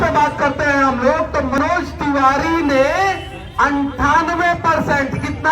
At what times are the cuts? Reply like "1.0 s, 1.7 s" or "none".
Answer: 1.6 s